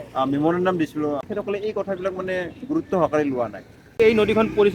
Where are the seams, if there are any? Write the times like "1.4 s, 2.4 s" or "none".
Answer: 1.3 s, 4.0 s